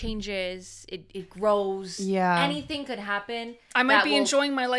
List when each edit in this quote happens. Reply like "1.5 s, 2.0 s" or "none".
none